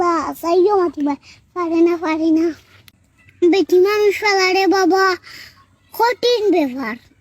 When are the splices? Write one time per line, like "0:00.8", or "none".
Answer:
0:02.7